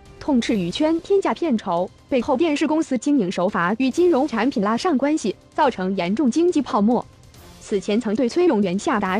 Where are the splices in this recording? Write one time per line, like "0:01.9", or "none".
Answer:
none